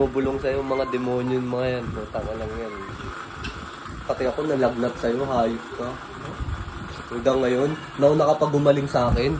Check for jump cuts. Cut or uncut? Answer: cut